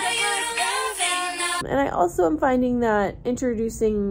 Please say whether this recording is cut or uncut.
cut